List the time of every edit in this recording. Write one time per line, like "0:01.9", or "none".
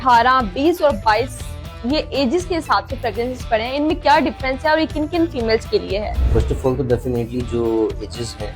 0:06.2

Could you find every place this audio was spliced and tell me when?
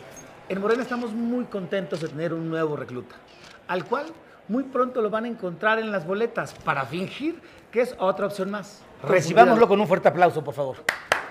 0:09.1

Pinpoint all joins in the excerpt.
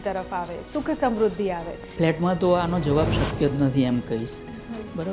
0:01.8

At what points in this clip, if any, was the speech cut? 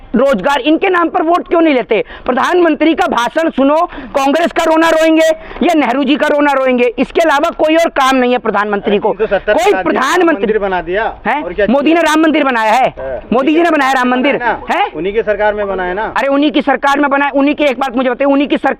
none

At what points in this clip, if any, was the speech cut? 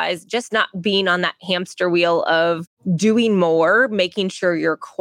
0:02.7

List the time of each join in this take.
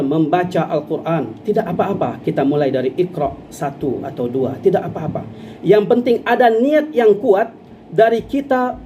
0:01.3

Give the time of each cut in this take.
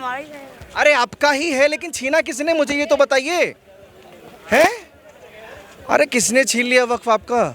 none

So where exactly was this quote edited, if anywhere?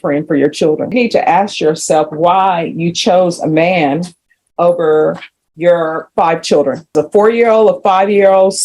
0:00.9
0:06.9

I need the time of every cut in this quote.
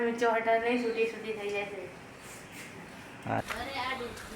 0:03.4

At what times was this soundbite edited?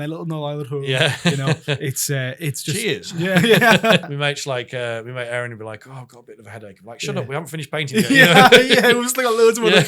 0:04.0

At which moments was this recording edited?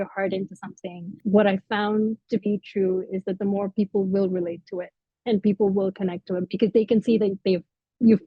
none

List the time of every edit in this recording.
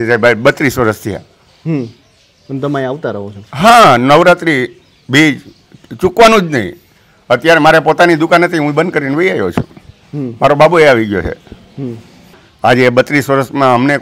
none

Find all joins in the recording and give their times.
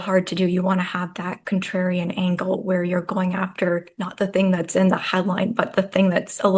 none

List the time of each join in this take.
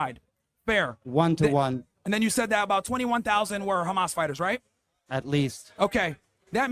0:01.9

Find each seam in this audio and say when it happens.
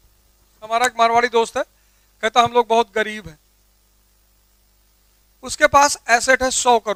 none

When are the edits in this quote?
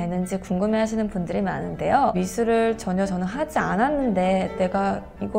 0:02.2

